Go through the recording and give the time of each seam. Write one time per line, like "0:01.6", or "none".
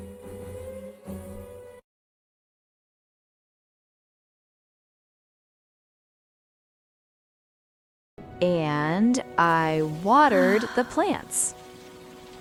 none